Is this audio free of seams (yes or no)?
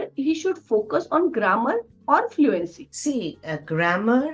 yes